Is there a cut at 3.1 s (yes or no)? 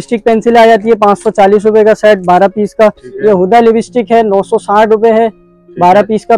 yes